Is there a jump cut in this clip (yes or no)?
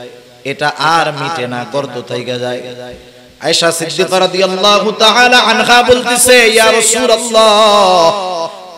no